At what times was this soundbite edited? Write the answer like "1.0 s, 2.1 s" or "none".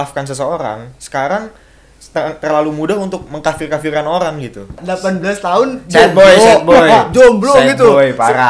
4.8 s

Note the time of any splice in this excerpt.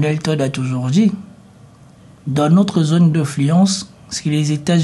none

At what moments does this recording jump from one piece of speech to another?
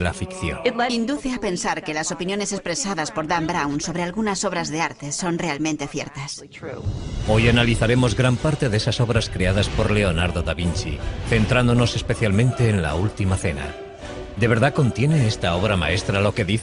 none

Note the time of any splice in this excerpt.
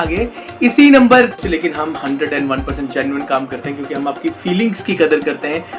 1.2 s

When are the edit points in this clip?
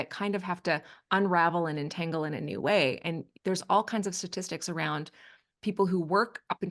none

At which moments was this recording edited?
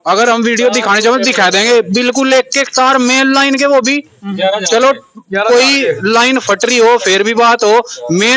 none

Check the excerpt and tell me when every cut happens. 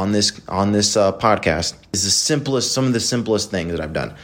2.1 s

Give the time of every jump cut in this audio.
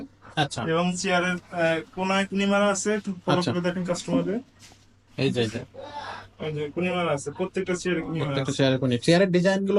none

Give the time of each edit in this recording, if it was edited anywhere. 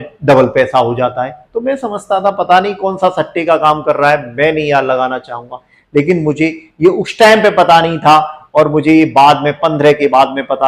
none

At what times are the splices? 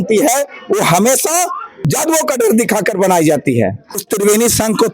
1.7 s, 3.9 s

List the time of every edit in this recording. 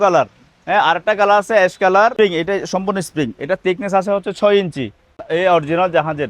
2.1 s, 5.2 s

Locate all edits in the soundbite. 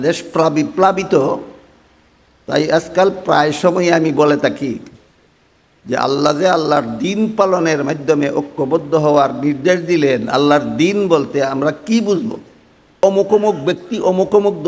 13.0 s

